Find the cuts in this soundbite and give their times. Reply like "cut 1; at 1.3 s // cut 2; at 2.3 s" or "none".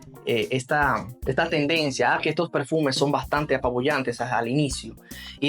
cut 1; at 1.1 s